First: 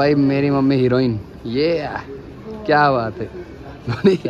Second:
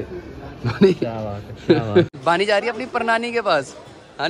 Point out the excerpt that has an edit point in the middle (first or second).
second